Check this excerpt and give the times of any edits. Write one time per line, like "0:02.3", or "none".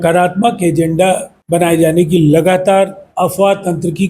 0:01.3
0:03.0